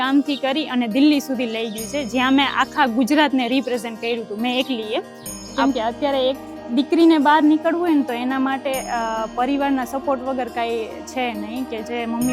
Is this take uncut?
no; 1 cut; at 5.5 s

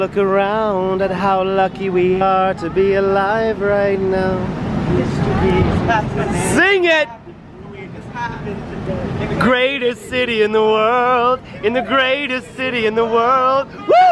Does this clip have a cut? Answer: no; 0 cuts

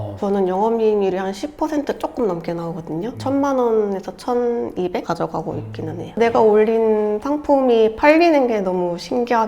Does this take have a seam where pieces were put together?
yes; 1 cut; at 6.0 s

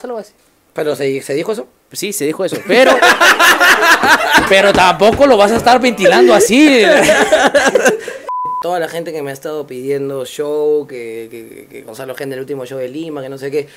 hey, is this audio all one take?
no; 1 cut; at 8.3 s

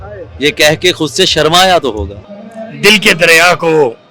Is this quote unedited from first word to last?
no; 1 cut; at 2.1 s

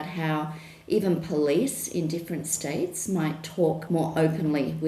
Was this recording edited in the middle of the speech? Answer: yes; 1 cut; at 3.8 s

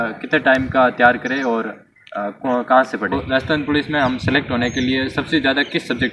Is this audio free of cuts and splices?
no; 1 cut; at 3.2 s

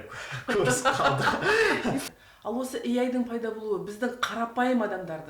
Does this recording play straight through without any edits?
no; 1 cut; at 2.0 s

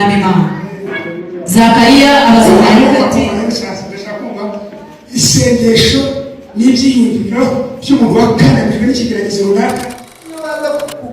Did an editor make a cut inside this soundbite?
yes; 1 cut; at 10.2 s

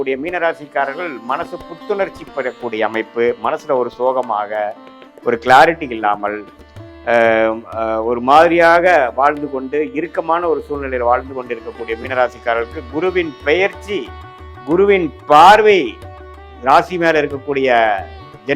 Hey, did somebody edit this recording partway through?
no; 0 cuts

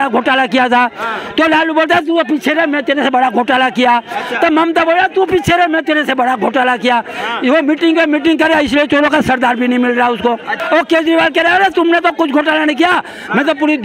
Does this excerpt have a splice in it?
yes; 1 cut; at 10.5 s

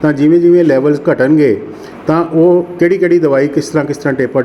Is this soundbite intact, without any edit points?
yes; 0 cuts

